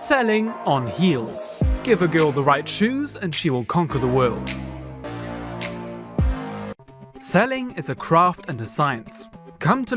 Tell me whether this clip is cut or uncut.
cut